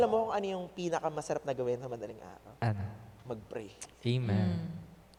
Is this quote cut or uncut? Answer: uncut